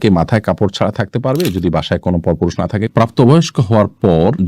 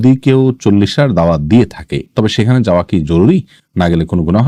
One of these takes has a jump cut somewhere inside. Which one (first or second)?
first